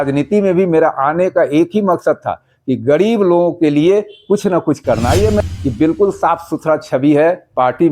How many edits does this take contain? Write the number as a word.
one